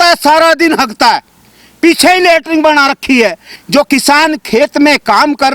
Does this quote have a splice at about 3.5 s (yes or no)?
yes